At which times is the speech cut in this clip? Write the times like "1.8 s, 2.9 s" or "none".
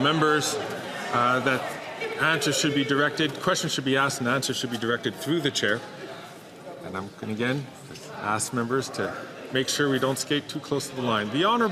none